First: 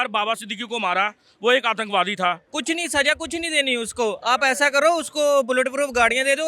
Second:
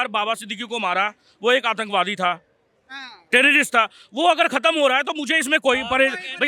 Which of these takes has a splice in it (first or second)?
first